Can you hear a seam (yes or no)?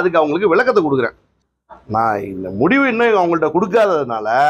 yes